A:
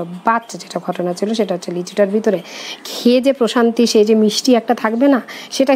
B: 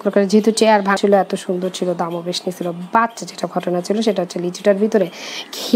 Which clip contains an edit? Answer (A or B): B